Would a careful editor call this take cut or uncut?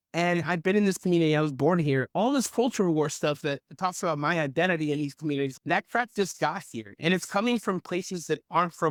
uncut